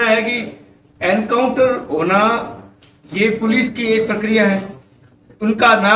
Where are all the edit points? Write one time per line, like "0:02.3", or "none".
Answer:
none